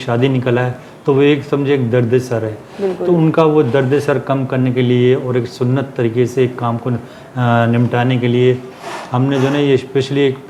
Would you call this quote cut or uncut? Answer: uncut